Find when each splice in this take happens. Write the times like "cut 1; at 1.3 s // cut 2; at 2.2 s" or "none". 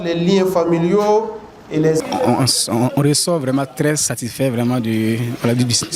cut 1; at 2.0 s